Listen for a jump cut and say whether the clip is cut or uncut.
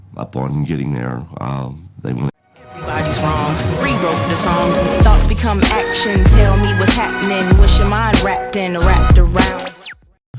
uncut